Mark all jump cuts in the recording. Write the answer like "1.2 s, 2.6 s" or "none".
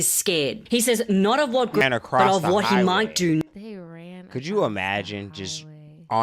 1.8 s